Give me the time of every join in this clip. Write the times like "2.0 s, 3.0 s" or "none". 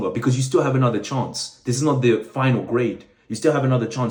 none